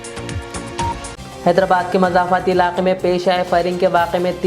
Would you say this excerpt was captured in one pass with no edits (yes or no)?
yes